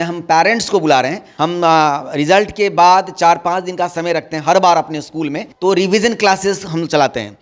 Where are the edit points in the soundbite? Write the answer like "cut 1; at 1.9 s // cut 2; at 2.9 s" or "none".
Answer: cut 1; at 1.2 s // cut 2; at 5.5 s